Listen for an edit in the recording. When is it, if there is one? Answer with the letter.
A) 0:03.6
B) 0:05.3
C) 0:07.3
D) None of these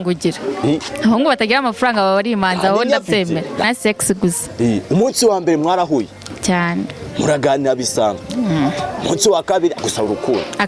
A